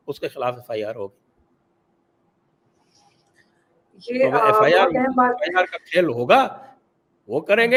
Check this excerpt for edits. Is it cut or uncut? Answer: uncut